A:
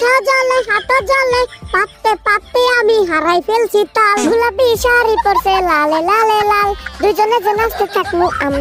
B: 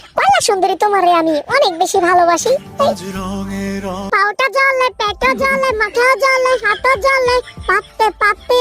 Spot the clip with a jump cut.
B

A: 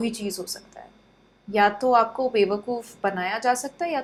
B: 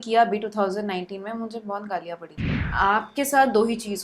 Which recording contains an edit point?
B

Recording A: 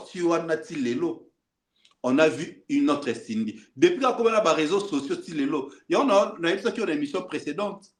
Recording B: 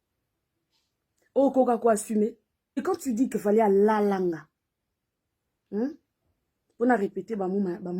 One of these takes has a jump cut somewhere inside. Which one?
B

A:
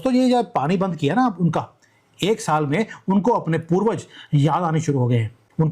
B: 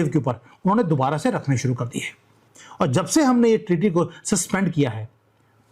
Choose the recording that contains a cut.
B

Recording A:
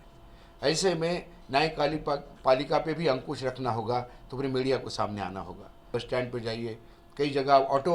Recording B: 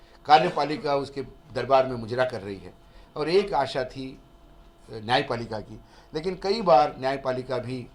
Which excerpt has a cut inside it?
A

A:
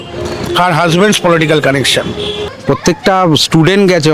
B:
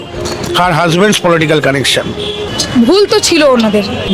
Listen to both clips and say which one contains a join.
A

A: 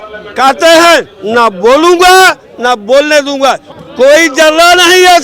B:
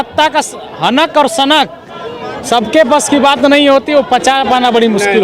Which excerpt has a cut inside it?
A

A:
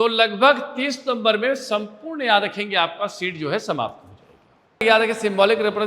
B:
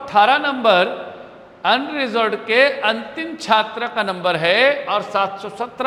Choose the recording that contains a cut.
A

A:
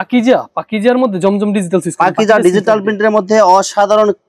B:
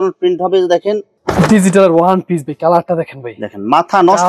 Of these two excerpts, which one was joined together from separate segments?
B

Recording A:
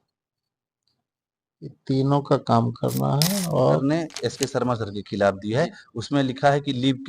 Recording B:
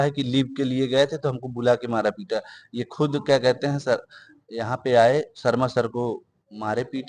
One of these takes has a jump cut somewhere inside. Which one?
A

